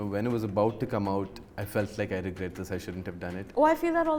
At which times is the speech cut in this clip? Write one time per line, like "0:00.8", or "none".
none